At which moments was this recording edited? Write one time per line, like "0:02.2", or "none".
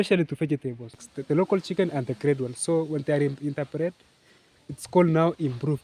0:00.9